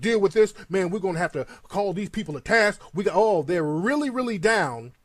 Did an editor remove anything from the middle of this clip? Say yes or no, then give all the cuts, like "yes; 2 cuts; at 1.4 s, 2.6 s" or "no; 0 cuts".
yes; 1 cut; at 4.1 s